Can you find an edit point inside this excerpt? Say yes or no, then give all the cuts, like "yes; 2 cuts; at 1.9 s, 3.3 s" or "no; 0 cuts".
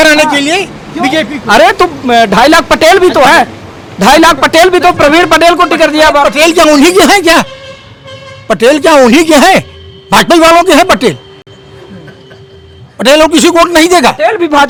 no; 0 cuts